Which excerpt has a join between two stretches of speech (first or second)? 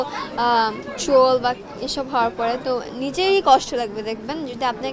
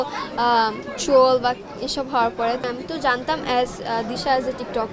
second